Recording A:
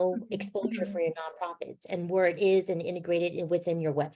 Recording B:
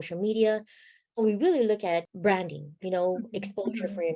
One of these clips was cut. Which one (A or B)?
B